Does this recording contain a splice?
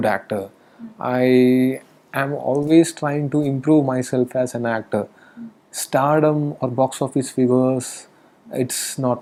no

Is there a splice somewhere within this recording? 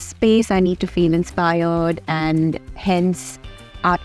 no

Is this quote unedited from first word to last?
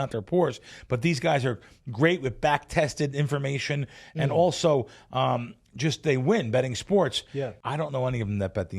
no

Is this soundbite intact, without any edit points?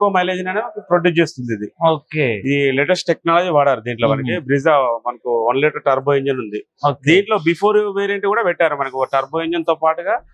yes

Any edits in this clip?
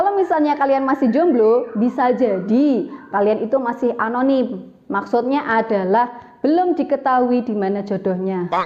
no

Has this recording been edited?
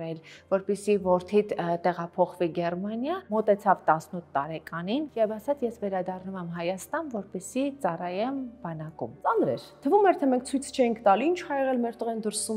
yes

